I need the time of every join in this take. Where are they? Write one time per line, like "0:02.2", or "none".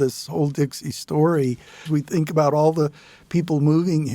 0:01.9